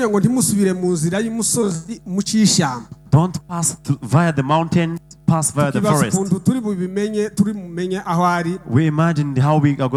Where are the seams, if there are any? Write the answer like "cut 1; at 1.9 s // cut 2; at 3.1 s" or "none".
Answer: none

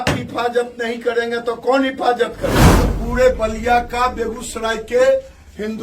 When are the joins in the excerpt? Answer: cut 1; at 2.9 s

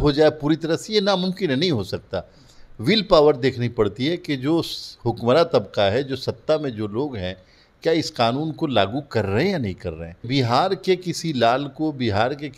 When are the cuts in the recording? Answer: cut 1; at 10.3 s

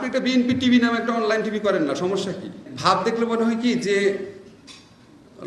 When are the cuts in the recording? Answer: cut 1; at 2.7 s

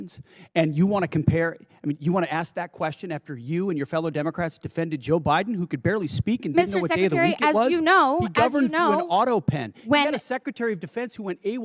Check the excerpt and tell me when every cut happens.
none

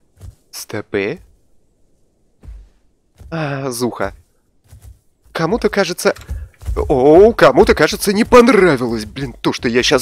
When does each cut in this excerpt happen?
none

